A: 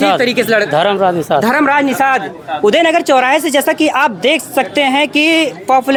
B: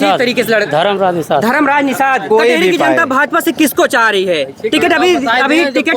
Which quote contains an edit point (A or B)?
B